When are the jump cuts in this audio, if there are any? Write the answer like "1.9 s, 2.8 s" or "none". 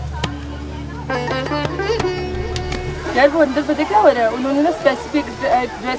none